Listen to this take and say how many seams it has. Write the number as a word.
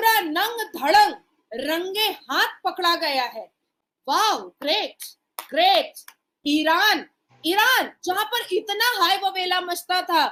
zero